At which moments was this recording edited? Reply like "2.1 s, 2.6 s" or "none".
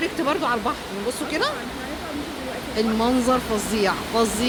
none